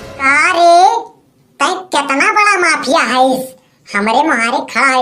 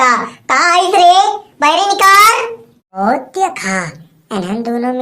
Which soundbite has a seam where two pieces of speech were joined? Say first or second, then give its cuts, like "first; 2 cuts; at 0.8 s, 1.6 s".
second; 1 cut; at 3.0 s